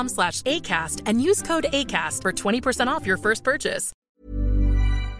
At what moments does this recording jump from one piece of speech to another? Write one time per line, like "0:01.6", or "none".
0:04.0